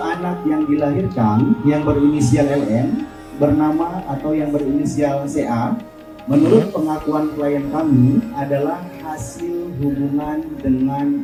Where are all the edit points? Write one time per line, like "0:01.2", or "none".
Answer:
none